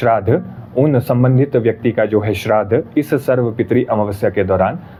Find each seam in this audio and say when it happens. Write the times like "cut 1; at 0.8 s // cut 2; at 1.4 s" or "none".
none